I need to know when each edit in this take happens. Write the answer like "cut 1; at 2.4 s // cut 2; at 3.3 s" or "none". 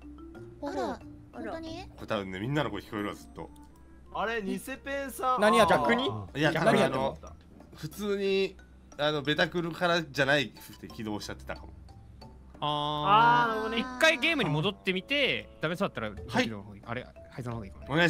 none